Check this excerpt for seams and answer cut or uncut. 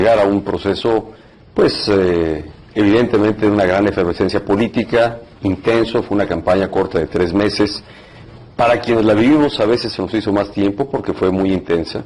cut